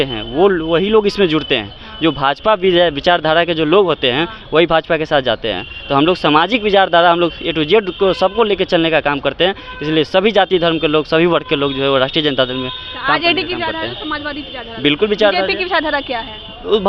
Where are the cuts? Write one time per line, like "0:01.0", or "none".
none